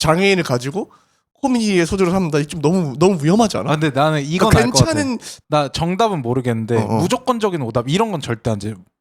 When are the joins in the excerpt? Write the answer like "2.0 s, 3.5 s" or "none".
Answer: 5.3 s